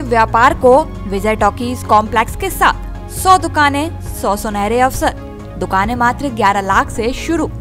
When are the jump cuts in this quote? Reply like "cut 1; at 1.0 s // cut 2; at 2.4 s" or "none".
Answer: none